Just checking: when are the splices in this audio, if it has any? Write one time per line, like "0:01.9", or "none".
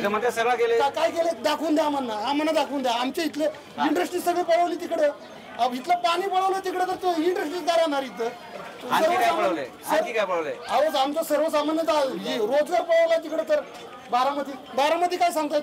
none